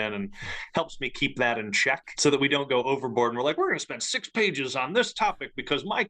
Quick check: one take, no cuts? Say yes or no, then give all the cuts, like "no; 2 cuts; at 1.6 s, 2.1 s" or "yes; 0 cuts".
no; 1 cut; at 2.1 s